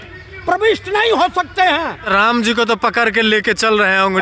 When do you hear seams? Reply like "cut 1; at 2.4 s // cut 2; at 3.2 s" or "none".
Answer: cut 1; at 2.1 s